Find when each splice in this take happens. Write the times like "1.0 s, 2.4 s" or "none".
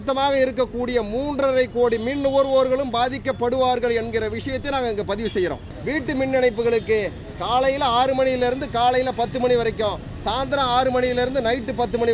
5.7 s